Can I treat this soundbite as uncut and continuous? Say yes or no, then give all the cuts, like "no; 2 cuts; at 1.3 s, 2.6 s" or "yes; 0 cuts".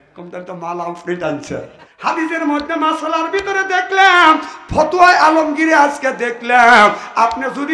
no; 1 cut; at 1.8 s